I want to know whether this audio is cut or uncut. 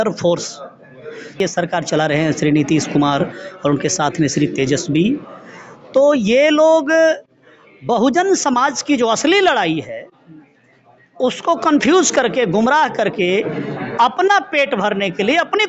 cut